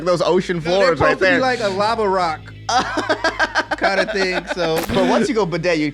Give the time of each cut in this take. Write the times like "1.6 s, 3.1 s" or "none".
4.9 s